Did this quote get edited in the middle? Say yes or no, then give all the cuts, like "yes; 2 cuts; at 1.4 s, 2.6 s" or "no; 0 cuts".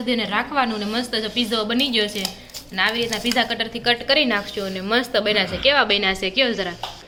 no; 0 cuts